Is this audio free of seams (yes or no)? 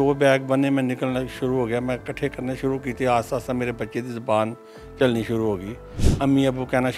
yes